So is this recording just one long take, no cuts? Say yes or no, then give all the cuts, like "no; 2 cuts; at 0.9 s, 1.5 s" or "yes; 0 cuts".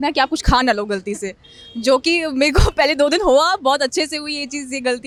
yes; 0 cuts